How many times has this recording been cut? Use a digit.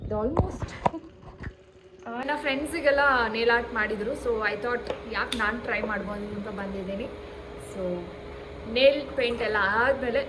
1